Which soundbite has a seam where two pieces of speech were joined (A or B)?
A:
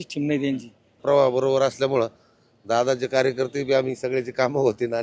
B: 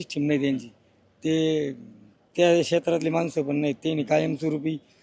A